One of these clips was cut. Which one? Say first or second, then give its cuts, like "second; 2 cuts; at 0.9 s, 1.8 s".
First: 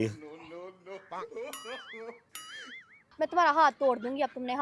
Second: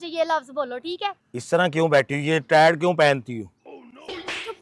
second; 1 cut; at 1.3 s